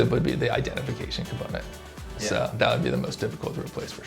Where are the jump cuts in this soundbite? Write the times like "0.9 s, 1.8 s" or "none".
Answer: none